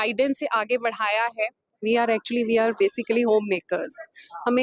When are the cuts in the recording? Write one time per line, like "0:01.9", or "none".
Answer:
0:01.7